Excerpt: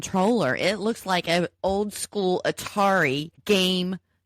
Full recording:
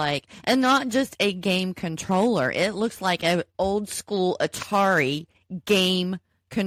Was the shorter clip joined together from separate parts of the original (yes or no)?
yes